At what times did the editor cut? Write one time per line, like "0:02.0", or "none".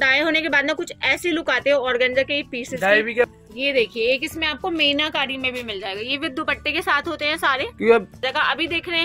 0:03.3
0:08.2